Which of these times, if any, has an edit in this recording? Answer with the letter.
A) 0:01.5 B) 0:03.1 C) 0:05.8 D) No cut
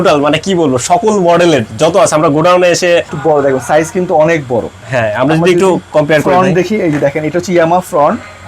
B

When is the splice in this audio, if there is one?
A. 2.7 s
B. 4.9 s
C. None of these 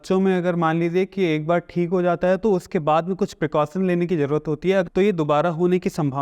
B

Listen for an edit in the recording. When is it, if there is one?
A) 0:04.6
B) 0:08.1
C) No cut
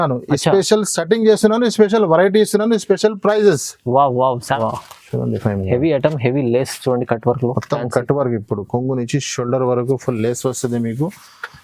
A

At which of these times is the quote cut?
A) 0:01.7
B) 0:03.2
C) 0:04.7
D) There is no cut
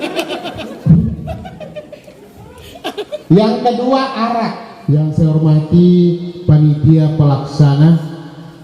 C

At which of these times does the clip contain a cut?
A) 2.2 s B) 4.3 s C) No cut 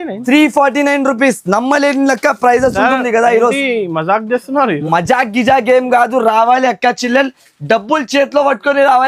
C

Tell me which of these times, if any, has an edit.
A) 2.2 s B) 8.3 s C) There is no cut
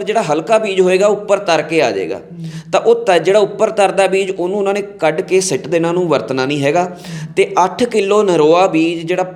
C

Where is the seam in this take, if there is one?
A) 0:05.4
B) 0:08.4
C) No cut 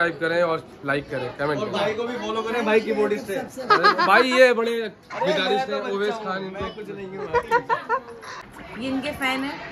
B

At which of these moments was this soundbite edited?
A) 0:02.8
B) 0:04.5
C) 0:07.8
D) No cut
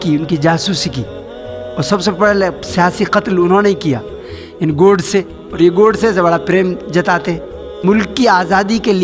C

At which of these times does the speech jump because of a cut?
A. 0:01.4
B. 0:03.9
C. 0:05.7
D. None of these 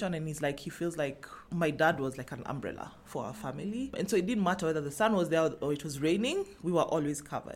B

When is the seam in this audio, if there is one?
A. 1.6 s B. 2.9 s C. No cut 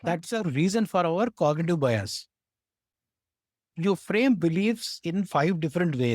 C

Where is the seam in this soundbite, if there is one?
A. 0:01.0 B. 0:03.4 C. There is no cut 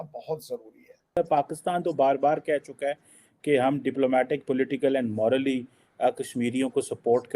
A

